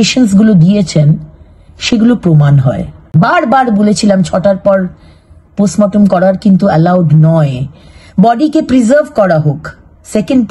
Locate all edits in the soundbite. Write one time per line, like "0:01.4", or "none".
0:03.1